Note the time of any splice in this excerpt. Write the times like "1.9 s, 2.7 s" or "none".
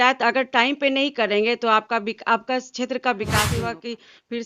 3.5 s